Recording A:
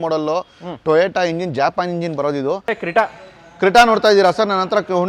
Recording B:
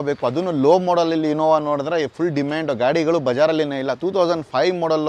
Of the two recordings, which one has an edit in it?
A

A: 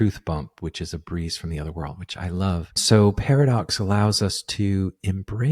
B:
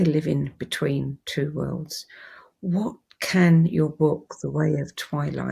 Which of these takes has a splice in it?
A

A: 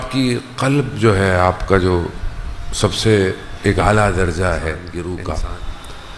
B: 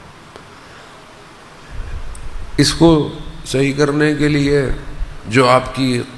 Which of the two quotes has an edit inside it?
A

